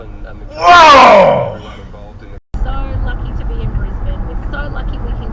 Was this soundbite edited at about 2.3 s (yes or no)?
yes